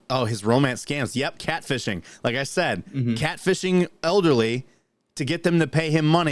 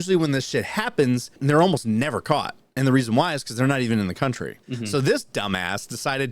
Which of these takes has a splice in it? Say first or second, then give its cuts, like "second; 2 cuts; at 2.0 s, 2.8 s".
second; 2 cuts; at 1.3 s, 4.6 s